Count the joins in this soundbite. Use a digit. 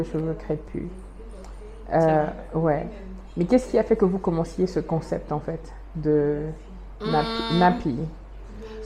0